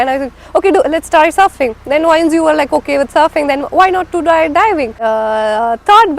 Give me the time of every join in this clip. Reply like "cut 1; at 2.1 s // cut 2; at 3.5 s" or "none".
cut 1; at 5.0 s